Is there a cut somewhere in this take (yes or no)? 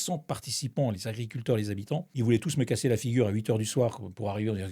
yes